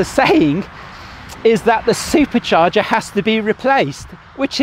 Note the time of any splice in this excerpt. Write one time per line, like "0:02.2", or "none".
none